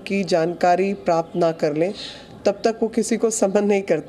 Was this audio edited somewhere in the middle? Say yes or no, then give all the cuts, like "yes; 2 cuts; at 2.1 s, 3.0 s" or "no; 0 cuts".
no; 0 cuts